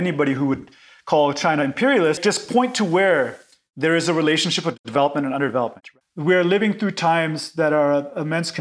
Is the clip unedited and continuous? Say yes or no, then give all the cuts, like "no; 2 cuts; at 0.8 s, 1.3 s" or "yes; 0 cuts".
no; 2 cuts; at 2.2 s, 5.8 s